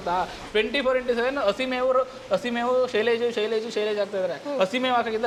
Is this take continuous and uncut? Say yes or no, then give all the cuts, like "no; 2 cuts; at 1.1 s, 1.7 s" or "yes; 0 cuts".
yes; 0 cuts